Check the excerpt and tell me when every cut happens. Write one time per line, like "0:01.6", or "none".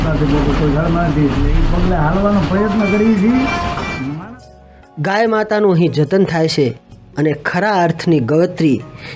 0:04.0